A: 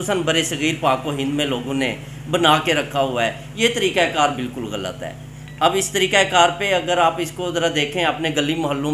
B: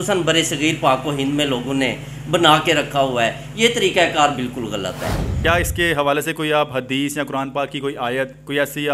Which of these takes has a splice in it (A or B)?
B